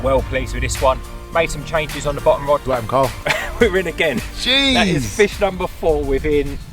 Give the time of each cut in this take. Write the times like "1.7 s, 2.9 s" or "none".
2.6 s